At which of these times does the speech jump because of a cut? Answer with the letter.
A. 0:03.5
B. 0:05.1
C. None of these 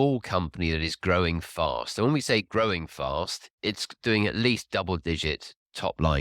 A